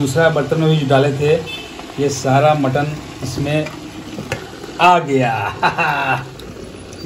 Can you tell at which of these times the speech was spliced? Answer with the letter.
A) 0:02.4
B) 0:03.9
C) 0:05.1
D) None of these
D